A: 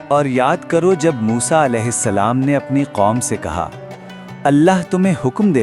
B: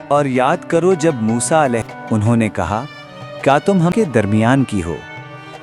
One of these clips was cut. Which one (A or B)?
B